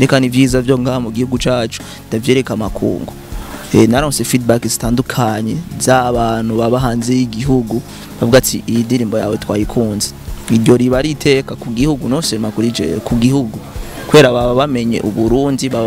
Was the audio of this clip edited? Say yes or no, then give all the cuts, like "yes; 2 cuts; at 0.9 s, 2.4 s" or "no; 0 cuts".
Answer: no; 0 cuts